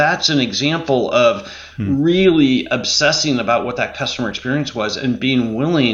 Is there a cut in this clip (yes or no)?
no